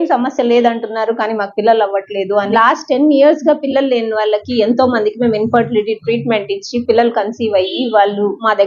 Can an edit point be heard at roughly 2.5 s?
yes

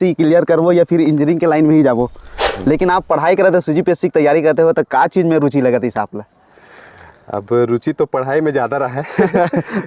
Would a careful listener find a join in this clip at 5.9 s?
no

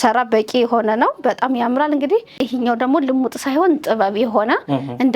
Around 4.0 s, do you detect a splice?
no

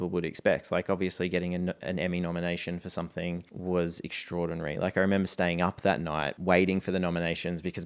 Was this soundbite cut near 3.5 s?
yes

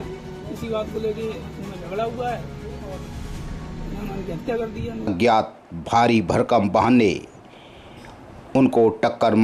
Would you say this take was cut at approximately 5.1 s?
yes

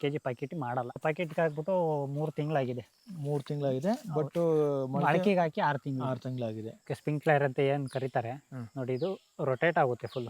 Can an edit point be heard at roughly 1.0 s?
yes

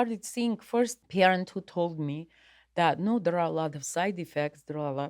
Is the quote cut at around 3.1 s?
no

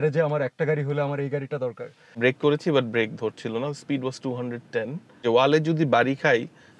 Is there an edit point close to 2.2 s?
yes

